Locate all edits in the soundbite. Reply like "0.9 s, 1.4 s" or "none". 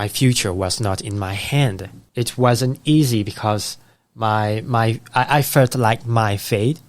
2.0 s